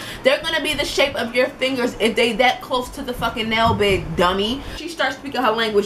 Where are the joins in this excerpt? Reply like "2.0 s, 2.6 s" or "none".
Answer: 4.8 s